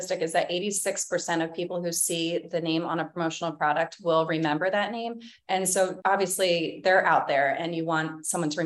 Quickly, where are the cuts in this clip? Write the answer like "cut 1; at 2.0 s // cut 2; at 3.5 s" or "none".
cut 1; at 6.0 s